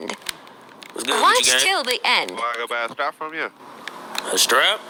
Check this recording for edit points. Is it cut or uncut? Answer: uncut